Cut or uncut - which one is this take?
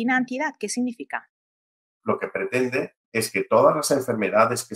cut